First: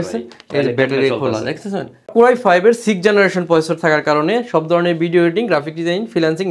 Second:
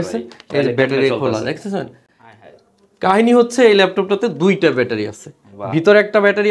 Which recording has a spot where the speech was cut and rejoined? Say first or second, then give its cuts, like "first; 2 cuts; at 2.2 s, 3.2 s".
first; 1 cut; at 2.1 s